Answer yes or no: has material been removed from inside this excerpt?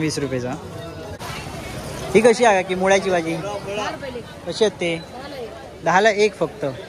yes